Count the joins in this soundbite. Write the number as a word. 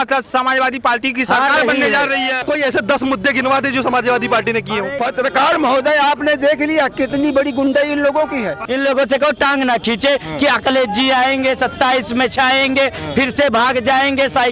three